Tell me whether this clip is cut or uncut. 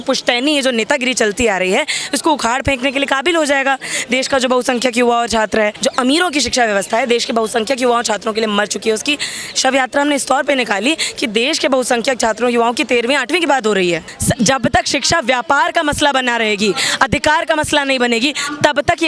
cut